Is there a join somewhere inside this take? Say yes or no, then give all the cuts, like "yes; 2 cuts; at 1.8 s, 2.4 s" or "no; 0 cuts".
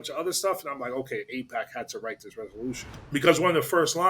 yes; 1 cut; at 2.9 s